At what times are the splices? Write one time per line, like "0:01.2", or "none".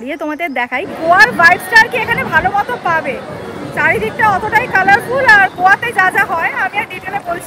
0:00.9